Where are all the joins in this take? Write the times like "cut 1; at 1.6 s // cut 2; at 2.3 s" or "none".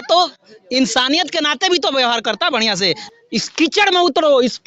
cut 1; at 3.0 s